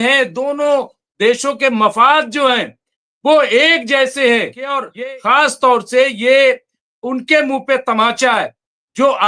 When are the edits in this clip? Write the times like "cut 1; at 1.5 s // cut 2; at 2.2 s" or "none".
cut 1; at 4.9 s